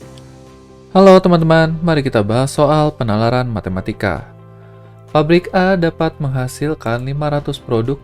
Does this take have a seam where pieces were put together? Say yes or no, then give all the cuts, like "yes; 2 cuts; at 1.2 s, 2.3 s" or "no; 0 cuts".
yes; 1 cut; at 0.9 s